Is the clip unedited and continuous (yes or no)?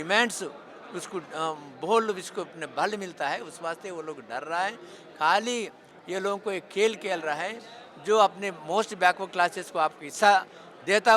yes